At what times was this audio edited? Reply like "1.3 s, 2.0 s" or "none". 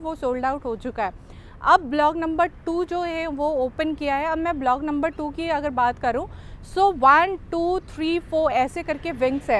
none